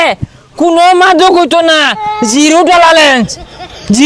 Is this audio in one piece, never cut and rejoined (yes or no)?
yes